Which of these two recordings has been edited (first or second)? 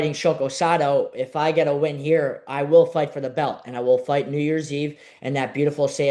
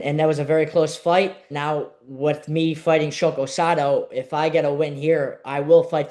second